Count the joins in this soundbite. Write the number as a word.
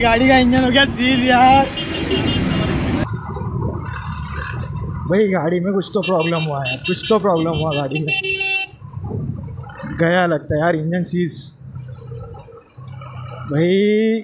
one